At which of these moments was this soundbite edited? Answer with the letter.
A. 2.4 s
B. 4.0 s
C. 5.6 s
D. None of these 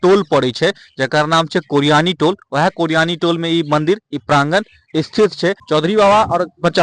C